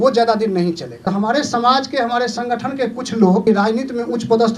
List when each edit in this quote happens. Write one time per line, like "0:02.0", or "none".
0:01.1
0:03.4

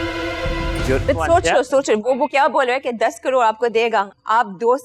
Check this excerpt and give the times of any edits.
0:01.0

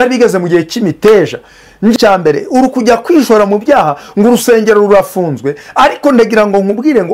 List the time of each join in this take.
0:01.9

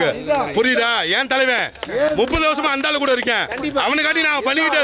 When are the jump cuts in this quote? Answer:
none

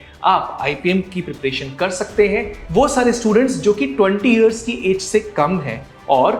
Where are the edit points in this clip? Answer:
0:02.6

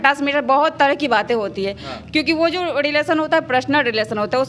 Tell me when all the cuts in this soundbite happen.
none

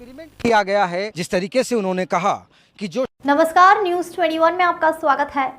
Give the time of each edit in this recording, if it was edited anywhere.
0:03.1

